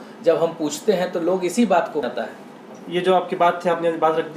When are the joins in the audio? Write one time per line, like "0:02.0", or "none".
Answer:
0:02.0